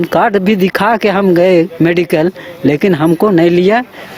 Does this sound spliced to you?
no; 0 cuts

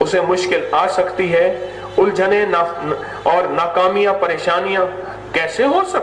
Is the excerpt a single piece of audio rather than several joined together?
yes; 0 cuts

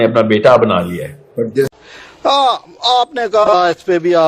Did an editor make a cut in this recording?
yes; 1 cut; at 1.7 s

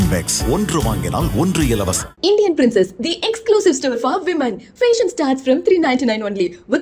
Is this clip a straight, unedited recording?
yes; 0 cuts

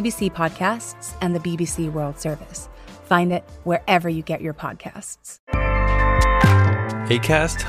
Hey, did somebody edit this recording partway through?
no; 0 cuts

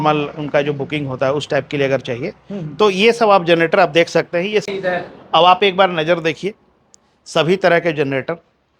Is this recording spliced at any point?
yes; 1 cut; at 4.7 s

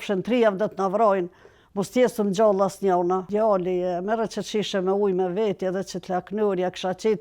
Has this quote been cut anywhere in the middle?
yes; 1 cut; at 3.3 s

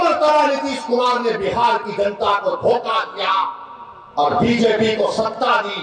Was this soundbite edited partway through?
no; 0 cuts

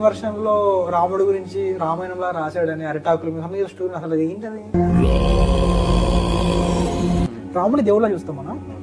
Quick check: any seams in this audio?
yes; 2 cuts; at 4.7 s, 7.3 s

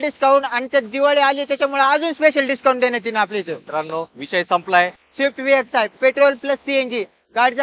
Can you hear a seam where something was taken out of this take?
yes; 1 cut; at 5.0 s

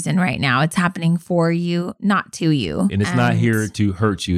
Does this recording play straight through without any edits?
no; 1 cut; at 2.9 s

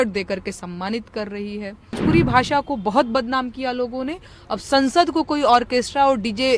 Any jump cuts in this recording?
yes; 1 cut; at 2.0 s

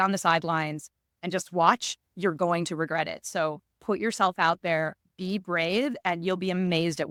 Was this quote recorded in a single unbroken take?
yes; 0 cuts

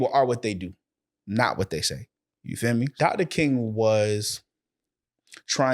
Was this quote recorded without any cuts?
no; 1 cut; at 2.9 s

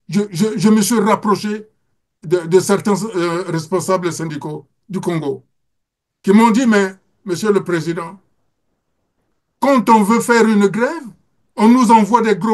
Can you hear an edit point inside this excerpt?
no; 0 cuts

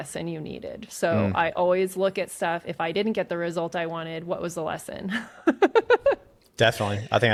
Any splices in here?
no; 0 cuts

